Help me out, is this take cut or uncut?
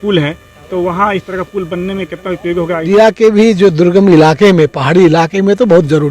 cut